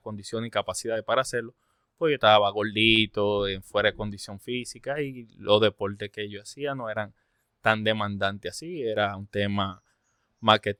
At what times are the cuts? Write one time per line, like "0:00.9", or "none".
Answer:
none